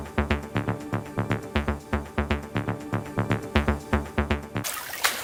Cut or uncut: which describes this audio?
uncut